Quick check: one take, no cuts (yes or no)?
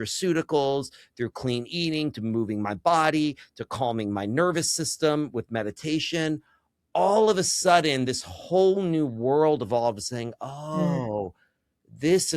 yes